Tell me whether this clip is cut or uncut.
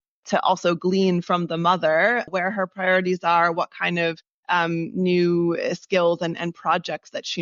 cut